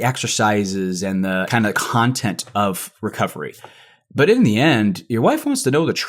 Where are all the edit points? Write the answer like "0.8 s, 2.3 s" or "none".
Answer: 1.5 s